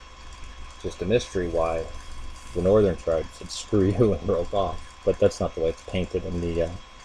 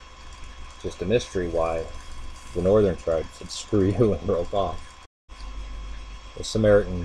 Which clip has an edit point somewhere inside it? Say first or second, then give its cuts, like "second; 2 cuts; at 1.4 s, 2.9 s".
first; 1 cut; at 4.9 s